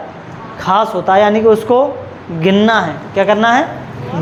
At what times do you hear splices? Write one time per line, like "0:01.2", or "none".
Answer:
none